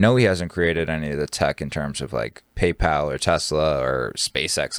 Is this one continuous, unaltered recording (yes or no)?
yes